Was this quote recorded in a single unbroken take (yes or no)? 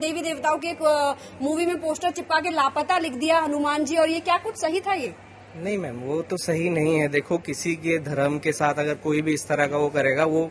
yes